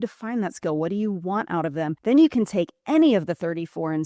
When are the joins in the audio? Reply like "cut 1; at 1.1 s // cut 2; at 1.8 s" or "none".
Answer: cut 1; at 2.0 s

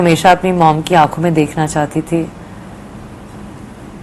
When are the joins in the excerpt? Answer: none

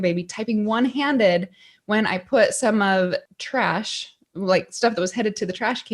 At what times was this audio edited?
cut 1; at 3.3 s

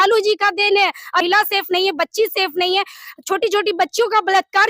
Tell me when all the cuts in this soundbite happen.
cut 1; at 1.2 s

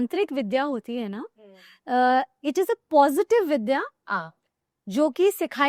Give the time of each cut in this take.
none

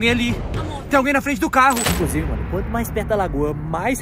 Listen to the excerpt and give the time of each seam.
cut 1; at 1.9 s

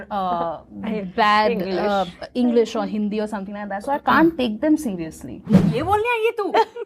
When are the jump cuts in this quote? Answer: cut 1; at 5.5 s

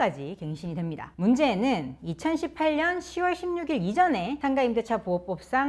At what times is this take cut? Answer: cut 1; at 1.0 s

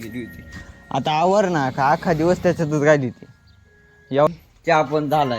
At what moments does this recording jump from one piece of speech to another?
cut 1; at 4.3 s

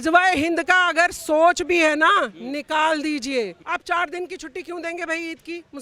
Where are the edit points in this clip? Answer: cut 1; at 3.6 s

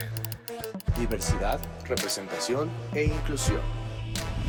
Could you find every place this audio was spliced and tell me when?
none

